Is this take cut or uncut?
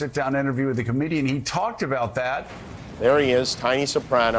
cut